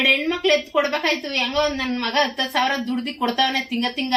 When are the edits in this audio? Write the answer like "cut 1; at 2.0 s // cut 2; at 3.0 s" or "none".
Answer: none